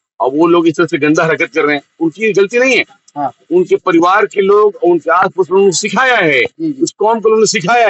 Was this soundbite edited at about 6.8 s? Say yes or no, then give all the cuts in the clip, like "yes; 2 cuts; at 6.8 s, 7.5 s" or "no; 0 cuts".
no; 0 cuts